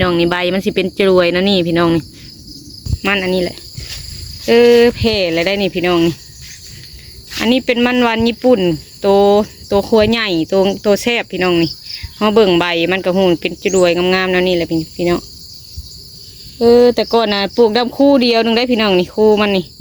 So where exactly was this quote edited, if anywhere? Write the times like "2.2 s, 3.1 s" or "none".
2.9 s